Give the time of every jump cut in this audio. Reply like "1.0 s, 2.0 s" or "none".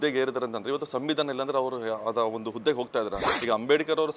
3.3 s